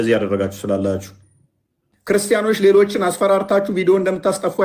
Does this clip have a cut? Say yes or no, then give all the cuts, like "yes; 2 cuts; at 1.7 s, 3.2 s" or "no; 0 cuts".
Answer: yes; 1 cut; at 2.0 s